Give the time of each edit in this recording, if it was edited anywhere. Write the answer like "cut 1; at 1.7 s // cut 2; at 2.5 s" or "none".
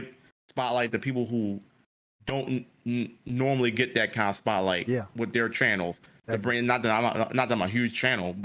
none